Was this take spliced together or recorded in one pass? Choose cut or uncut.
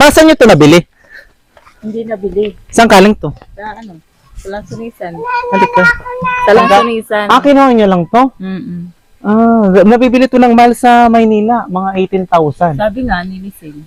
uncut